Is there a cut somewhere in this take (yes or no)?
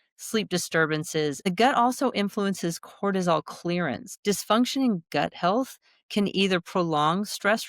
yes